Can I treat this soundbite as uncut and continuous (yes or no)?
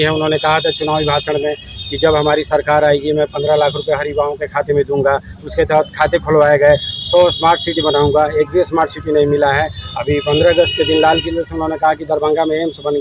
yes